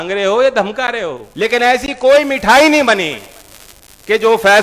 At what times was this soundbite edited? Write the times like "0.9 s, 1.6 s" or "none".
1.2 s